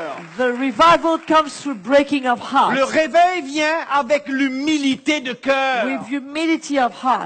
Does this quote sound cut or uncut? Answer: uncut